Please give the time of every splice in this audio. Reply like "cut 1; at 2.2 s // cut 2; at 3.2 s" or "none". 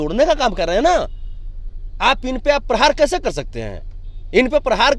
none

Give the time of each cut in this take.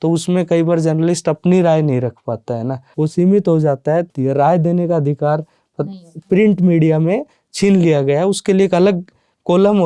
cut 1; at 2.8 s // cut 2; at 4.1 s

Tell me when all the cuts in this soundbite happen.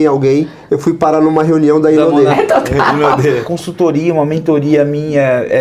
cut 1; at 2.2 s // cut 2; at 3.5 s

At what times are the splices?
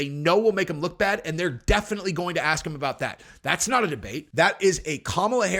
cut 1; at 4.2 s

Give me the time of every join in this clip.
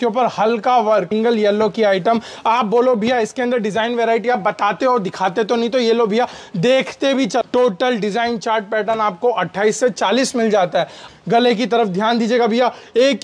cut 1; at 1.1 s // cut 2; at 7.4 s // cut 3; at 11.0 s

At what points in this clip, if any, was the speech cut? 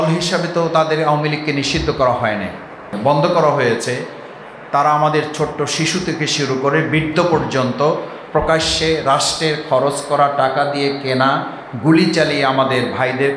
cut 1; at 2.9 s

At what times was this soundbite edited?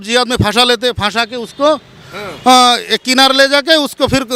none

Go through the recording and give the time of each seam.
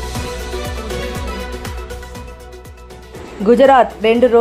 cut 1; at 3.0 s

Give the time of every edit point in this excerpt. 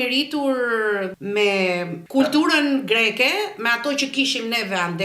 cut 1; at 1.2 s // cut 2; at 2.0 s

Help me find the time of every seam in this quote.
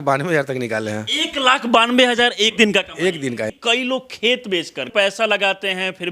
cut 1; at 2.5 s // cut 2; at 3.5 s // cut 3; at 4.9 s

